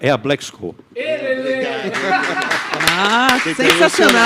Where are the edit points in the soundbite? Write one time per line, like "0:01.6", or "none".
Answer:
none